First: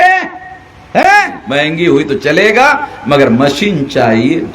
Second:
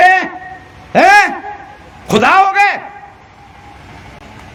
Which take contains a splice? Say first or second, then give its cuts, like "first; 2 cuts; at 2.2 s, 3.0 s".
first; 1 cut; at 1.4 s